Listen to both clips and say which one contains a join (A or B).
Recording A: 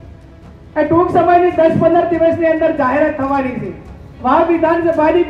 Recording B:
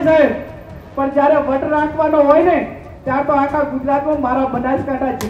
A